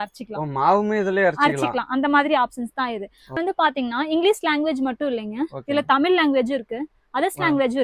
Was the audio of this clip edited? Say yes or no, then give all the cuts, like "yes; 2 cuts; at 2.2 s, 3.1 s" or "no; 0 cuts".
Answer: yes; 1 cut; at 3.4 s